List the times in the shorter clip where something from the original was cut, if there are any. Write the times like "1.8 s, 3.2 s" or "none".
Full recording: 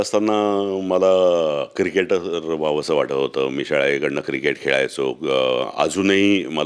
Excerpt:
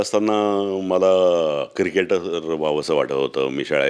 none